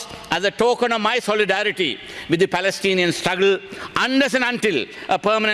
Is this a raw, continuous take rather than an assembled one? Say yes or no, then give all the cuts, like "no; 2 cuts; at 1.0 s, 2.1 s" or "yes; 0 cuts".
yes; 0 cuts